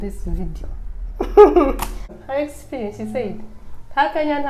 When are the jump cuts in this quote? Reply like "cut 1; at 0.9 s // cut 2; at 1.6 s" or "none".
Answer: cut 1; at 2.1 s

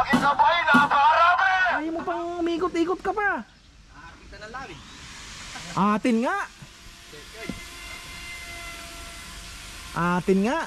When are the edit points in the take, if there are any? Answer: cut 1; at 1.8 s

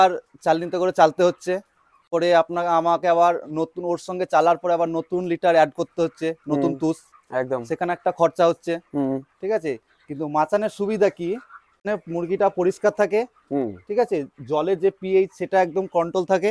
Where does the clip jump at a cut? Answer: cut 1; at 2.1 s // cut 2; at 11.9 s

